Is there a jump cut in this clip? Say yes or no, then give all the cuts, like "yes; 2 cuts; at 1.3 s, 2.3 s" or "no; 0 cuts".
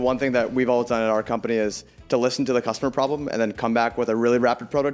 no; 0 cuts